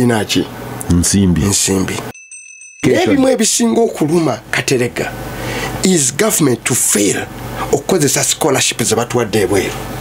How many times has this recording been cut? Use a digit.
1